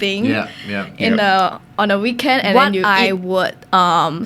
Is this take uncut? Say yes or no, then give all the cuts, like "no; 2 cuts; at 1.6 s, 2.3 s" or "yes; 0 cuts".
no; 1 cut; at 2.5 s